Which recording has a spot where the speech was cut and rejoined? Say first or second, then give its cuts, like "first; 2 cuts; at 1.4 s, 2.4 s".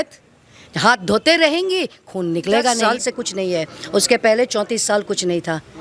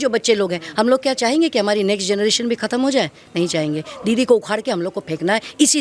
first; 1 cut; at 2.8 s